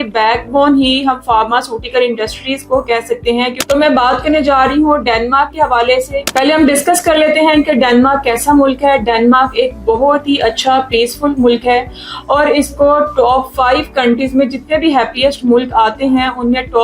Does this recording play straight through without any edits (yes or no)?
no